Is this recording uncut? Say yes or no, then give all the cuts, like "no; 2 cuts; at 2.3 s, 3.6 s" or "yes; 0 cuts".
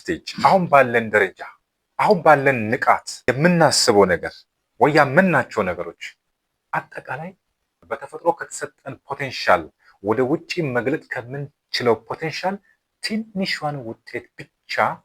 no; 1 cut; at 3.1 s